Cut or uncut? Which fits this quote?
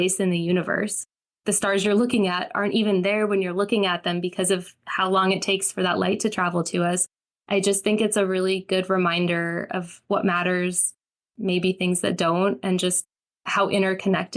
uncut